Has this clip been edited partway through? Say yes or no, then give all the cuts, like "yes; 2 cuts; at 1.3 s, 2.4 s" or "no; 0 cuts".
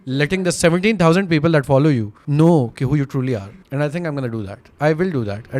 yes; 2 cuts; at 2.2 s, 3.4 s